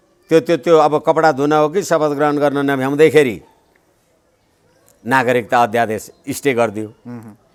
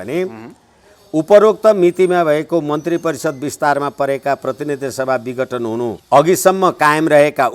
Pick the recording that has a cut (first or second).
second